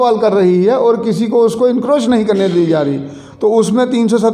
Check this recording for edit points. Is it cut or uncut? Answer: uncut